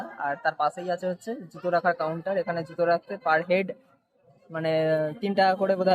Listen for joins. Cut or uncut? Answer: uncut